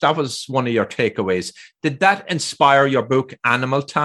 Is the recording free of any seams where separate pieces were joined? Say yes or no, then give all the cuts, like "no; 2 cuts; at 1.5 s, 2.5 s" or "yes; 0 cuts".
yes; 0 cuts